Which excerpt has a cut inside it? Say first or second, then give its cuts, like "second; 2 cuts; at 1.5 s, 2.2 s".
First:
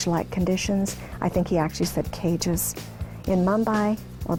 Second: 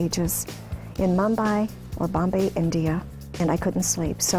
second; 1 cut; at 3.4 s